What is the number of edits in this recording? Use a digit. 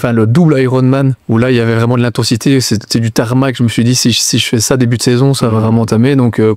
1